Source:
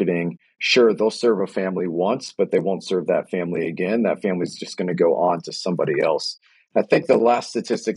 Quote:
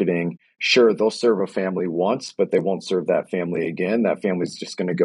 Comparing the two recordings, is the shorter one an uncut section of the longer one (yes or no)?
yes